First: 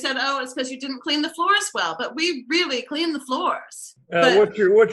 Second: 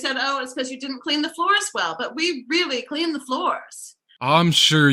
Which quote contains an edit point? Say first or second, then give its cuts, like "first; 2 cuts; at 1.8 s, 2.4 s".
first; 1 cut; at 3.9 s